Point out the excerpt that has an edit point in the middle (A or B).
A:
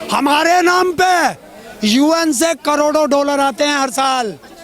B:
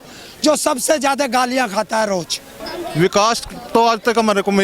B